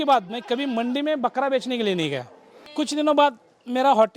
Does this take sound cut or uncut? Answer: cut